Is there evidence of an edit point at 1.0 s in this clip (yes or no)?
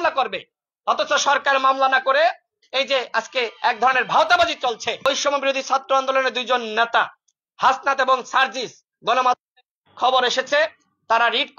no